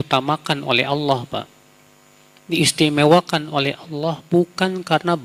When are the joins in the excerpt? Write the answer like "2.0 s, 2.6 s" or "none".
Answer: none